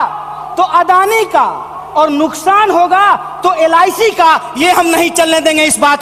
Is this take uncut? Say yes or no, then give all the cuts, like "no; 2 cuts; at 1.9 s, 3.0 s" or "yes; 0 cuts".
yes; 0 cuts